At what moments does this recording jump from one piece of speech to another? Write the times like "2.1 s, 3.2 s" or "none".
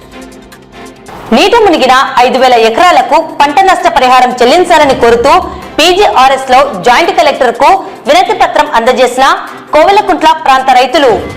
1.0 s

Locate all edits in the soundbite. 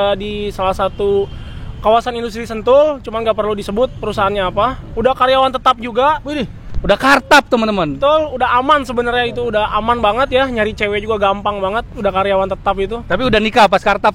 none

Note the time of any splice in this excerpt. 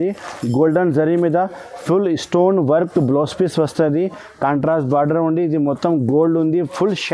none

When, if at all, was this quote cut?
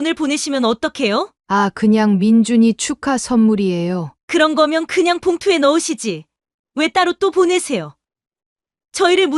1.4 s

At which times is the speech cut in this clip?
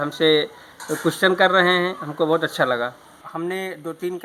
3.2 s

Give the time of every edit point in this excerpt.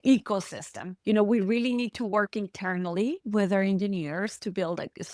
0.9 s

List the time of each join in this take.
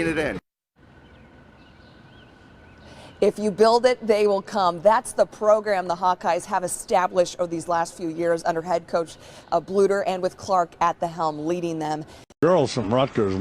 12.4 s

